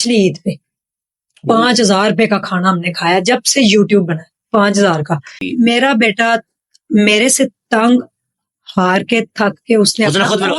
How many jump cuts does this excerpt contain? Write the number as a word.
one